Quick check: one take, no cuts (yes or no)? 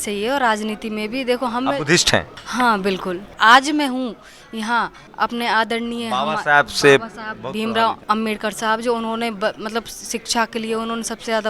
no